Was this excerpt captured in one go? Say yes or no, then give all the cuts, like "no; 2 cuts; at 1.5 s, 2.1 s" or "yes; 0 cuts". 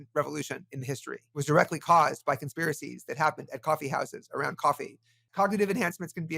no; 2 cuts; at 1.4 s, 5.3 s